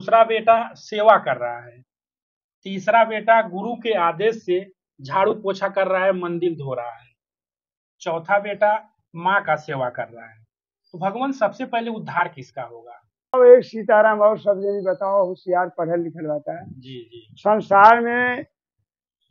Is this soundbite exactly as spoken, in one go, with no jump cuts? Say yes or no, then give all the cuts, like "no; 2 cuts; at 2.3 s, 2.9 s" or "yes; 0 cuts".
no; 1 cut; at 13.3 s